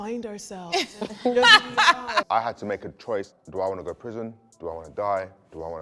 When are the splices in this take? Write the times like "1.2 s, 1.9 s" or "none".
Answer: 2.3 s, 3.4 s